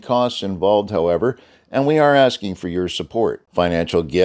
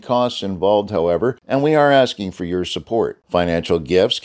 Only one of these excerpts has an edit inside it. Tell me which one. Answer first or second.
second